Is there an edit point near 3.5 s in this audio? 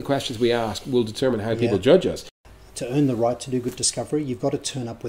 no; 1 cut; at 2.3 s

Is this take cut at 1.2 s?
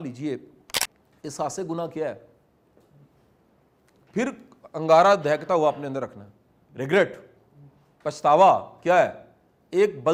no; 0 cuts

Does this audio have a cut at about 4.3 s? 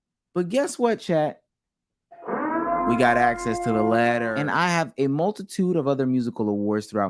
yes; 1 cut; at 4.3 s

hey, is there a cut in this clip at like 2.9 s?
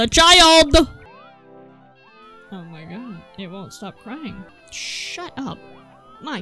no; 1 cut; at 4.5 s

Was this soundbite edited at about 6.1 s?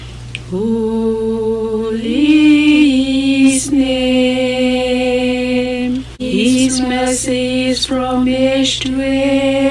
yes; 1 cut; at 6.1 s

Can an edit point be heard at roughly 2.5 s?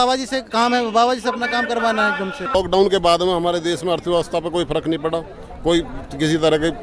yes; 1 cut; at 2.5 s

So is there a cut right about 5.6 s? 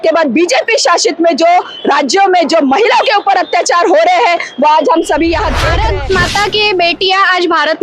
yes; 1 cut; at 5.6 s

